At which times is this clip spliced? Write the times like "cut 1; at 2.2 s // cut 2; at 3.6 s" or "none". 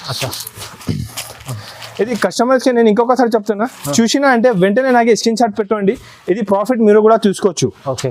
none

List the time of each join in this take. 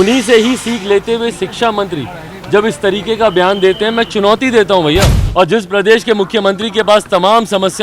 cut 1; at 5.2 s

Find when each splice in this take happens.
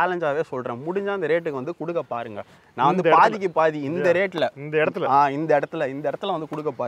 none

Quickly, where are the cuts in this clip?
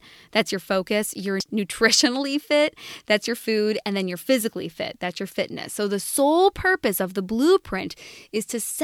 cut 1; at 1.4 s

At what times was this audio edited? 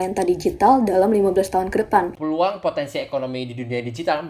cut 1; at 2.1 s

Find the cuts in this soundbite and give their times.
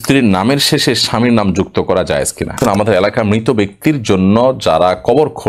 cut 1; at 2.6 s

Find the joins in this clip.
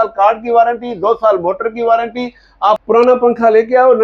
none

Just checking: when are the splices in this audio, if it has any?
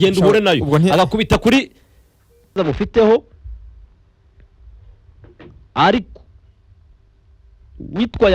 cut 1; at 2.6 s

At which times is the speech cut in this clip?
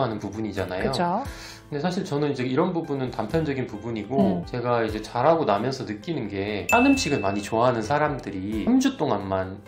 cut 1; at 4.5 s // cut 2; at 6.7 s // cut 3; at 8.6 s

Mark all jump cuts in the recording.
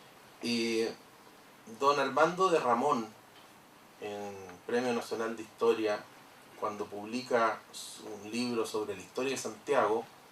cut 1; at 1.9 s

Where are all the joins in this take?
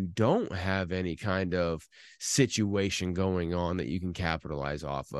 none

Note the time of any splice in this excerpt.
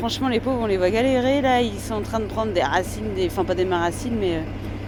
none

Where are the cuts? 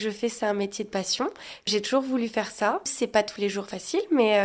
cut 1; at 1.7 s // cut 2; at 2.9 s

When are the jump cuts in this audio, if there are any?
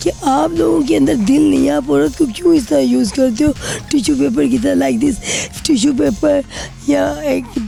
none

